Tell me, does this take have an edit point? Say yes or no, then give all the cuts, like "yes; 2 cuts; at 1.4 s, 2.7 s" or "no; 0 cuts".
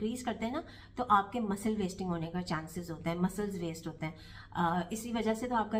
no; 0 cuts